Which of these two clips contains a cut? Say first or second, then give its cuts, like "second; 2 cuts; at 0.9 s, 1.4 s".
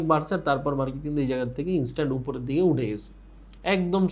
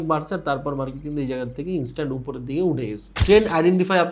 second; 1 cut; at 3.1 s